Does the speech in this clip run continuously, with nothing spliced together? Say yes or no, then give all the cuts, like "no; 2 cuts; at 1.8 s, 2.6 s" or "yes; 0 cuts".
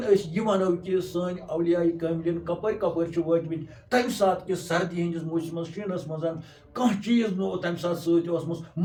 yes; 0 cuts